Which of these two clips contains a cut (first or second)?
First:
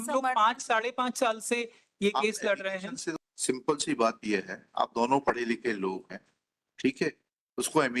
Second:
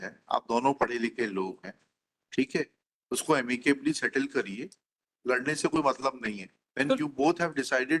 first